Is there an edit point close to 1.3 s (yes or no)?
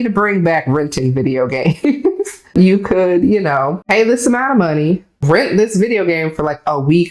no